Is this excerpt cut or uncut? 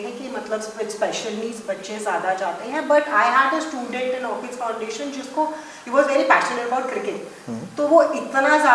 uncut